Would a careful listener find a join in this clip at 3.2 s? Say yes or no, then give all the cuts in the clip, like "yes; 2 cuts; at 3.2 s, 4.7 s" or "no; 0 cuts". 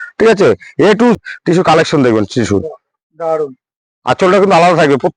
no; 1 cut; at 1.2 s